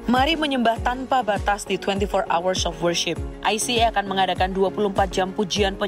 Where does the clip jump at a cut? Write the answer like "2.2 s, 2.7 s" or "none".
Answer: 3.2 s